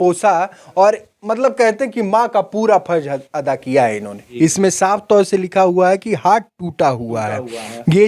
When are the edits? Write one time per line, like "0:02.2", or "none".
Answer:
0:04.2